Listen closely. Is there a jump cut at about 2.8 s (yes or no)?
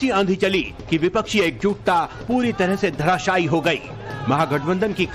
yes